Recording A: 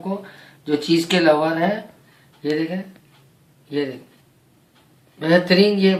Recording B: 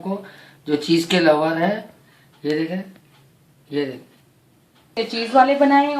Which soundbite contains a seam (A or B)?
B